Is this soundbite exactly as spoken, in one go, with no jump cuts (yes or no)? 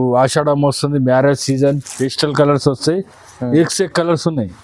no